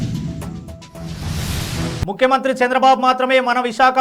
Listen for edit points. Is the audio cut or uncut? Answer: cut